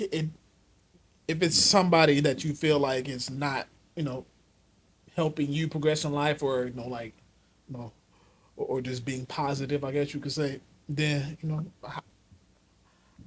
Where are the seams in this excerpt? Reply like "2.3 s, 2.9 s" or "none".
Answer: none